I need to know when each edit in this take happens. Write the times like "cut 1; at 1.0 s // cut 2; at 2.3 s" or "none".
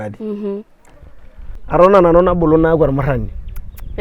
cut 1; at 1.5 s